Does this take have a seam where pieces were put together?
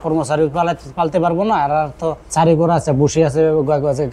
yes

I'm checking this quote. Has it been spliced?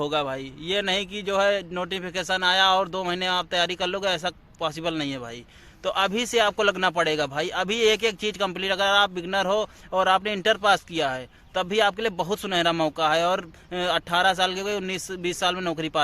no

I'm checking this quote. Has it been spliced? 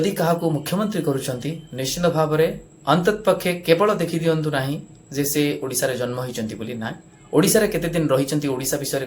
no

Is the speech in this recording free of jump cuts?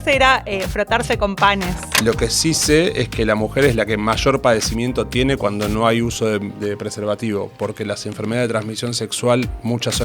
no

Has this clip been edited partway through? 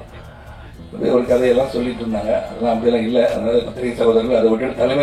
no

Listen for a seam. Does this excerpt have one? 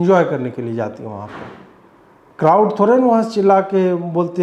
no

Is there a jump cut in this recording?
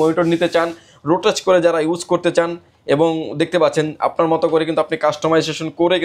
no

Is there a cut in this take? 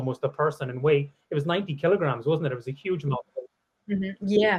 no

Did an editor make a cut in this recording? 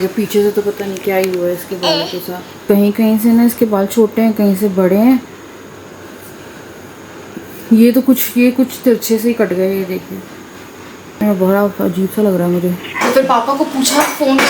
yes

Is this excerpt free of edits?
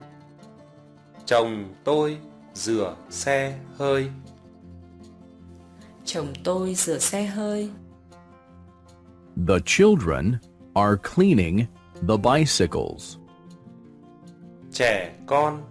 yes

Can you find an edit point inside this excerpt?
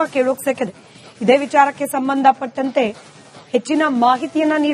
no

